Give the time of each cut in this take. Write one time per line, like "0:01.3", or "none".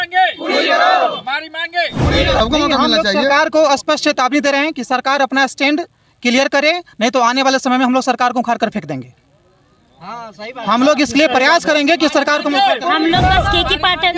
0:02.4